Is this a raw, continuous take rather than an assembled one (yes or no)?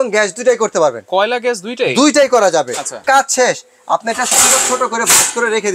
no